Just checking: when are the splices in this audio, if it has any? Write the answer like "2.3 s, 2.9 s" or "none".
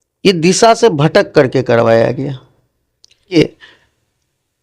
3.4 s